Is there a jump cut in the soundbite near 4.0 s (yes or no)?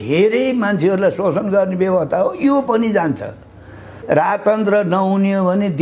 yes